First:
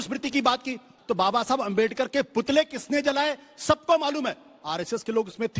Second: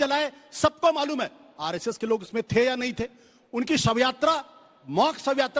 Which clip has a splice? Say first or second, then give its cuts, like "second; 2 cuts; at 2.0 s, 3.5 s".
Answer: first; 1 cut; at 0.9 s